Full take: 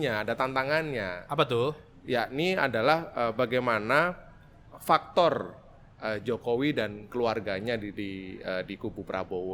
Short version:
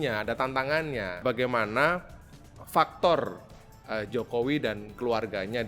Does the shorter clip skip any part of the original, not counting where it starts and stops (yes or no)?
yes